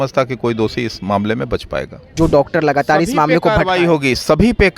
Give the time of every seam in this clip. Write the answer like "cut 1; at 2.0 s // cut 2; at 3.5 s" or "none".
cut 1; at 2.0 s